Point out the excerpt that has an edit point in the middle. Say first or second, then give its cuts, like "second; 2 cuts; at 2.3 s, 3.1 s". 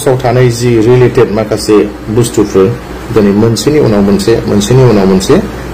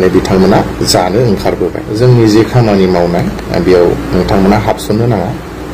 second; 1 cut; at 1.9 s